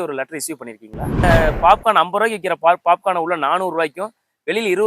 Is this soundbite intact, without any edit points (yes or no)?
no